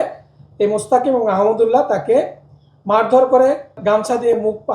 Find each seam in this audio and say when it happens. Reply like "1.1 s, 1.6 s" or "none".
3.8 s